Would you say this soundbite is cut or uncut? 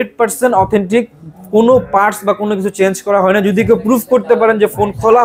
uncut